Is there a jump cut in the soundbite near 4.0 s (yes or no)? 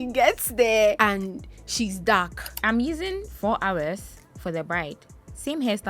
no